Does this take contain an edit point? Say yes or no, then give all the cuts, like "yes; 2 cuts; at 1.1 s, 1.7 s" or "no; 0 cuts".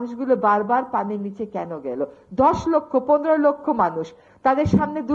no; 0 cuts